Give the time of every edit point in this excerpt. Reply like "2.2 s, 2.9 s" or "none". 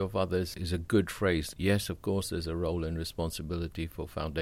1.5 s